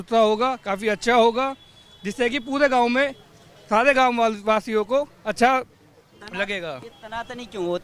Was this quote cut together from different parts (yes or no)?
no